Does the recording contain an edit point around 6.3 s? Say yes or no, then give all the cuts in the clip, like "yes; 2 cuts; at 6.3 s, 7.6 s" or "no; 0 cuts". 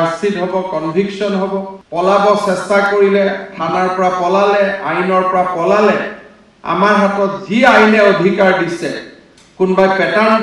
no; 1 cut; at 1.8 s